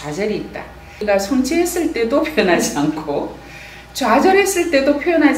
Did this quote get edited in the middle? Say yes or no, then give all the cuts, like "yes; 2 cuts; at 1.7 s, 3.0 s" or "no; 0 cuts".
yes; 1 cut; at 1.0 s